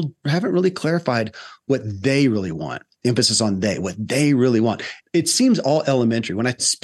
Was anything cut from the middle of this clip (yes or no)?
no